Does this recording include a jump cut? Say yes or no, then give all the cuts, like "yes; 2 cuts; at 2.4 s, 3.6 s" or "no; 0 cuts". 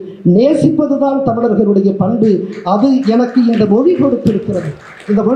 no; 0 cuts